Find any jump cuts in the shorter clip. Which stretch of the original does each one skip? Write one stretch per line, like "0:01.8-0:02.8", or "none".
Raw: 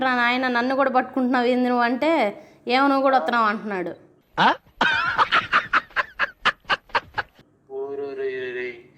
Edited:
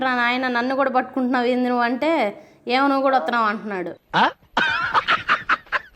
0:04.0-0:04.2